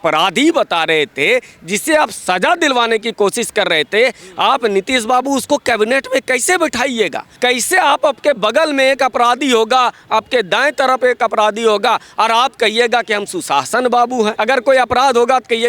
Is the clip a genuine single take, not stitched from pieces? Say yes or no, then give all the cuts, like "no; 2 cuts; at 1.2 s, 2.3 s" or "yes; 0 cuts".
no; 2 cuts; at 7.2 s, 14.4 s